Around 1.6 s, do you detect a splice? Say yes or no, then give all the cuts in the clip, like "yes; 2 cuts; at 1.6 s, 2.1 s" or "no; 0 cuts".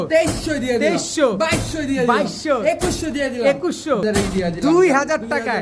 no; 1 cut; at 4.0 s